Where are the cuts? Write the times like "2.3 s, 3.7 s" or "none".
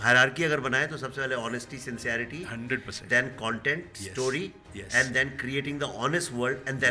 none